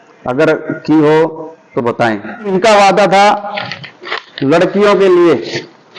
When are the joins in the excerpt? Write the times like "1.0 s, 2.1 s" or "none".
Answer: 2.5 s

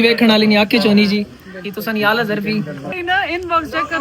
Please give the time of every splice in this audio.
3.0 s

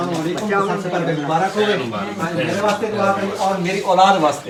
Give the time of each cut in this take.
none

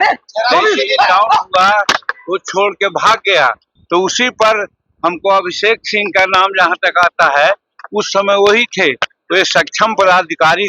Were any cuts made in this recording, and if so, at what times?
3.7 s

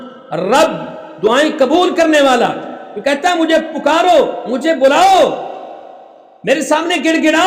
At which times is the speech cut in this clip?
none

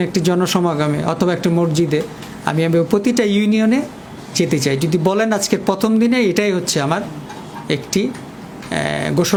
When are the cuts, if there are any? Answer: none

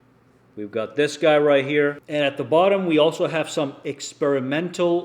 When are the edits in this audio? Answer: 2.0 s

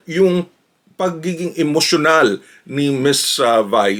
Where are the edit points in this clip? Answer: none

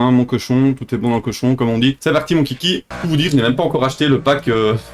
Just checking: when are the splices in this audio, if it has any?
2.0 s, 2.9 s

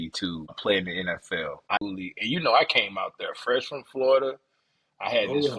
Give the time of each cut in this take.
1.8 s

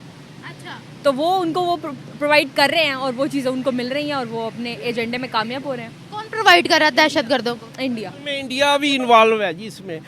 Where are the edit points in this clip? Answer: 8.5 s

